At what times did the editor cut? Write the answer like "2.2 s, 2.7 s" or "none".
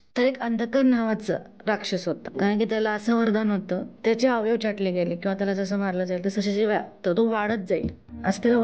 2.3 s, 3.9 s